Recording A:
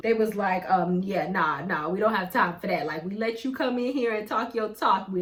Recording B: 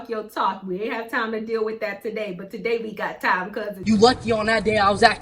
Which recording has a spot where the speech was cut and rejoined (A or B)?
B